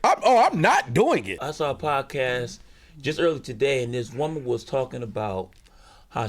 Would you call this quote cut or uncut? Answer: cut